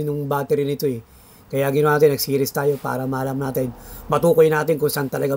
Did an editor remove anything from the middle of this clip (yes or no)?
no